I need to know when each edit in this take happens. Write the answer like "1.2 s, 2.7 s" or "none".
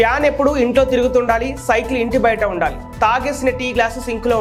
none